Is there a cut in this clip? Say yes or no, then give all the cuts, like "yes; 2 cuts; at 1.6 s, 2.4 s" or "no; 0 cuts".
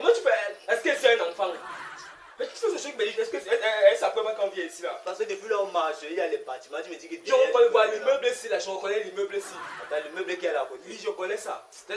no; 0 cuts